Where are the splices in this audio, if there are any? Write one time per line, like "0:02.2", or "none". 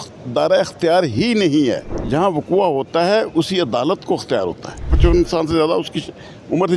0:01.9
0:04.9